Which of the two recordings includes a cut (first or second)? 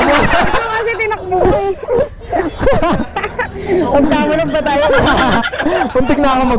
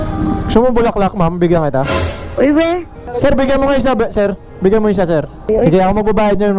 second